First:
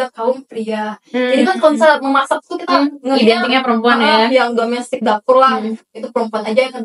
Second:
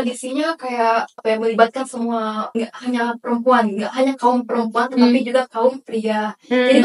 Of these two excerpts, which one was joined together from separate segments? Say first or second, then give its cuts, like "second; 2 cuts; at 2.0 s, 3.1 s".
second; 2 cuts; at 1.2 s, 2.4 s